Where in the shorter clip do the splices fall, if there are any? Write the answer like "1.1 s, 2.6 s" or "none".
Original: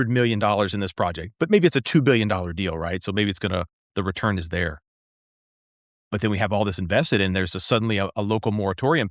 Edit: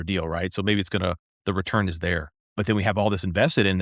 2.4 s